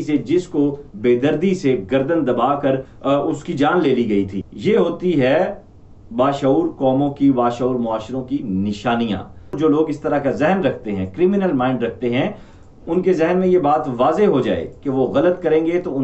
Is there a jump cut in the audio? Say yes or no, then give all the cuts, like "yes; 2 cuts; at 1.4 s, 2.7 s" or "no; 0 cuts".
yes; 2 cuts; at 4.4 s, 9.5 s